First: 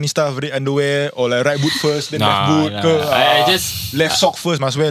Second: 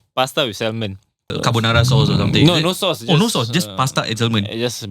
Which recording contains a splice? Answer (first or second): second